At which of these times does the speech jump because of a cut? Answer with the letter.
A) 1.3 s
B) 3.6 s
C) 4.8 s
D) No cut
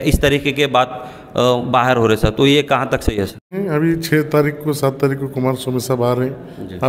B